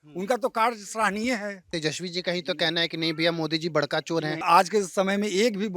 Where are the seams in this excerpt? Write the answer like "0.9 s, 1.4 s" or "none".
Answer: 1.7 s, 4.4 s